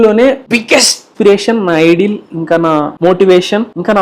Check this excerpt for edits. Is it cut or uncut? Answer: cut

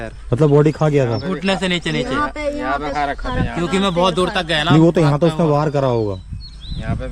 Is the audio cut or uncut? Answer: uncut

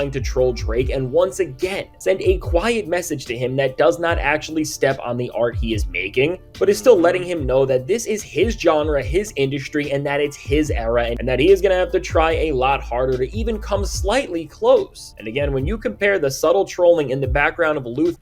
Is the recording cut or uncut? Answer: uncut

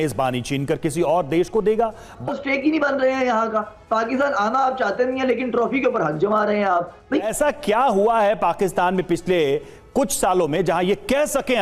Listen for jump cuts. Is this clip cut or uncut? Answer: cut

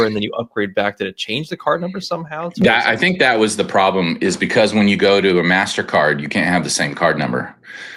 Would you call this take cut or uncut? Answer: uncut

